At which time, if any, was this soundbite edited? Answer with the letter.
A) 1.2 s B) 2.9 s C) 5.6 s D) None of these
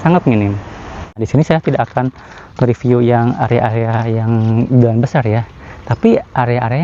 A